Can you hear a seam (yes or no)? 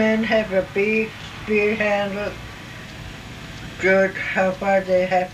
yes